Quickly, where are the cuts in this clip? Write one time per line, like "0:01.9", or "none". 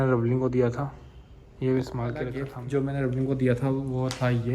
0:02.6